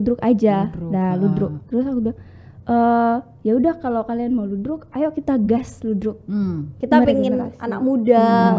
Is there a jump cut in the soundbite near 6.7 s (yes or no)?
yes